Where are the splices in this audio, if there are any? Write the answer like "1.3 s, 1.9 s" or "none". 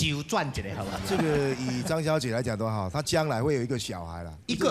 1.0 s